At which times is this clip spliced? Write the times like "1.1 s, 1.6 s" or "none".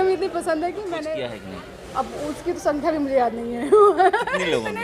1.1 s